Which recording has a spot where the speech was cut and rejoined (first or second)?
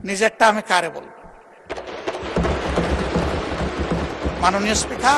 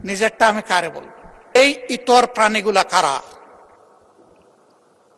second